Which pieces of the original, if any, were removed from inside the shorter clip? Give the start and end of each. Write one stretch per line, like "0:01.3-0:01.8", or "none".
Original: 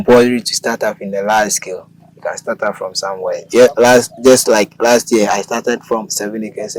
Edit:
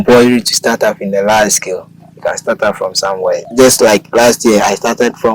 0:03.4-0:04.1